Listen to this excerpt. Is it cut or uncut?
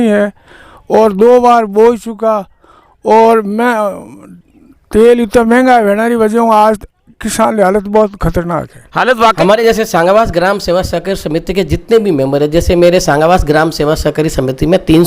cut